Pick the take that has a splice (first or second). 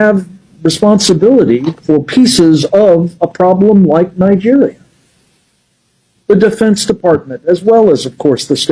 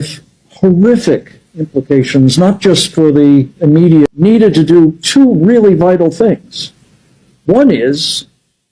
second